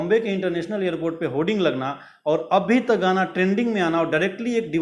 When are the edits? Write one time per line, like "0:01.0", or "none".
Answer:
none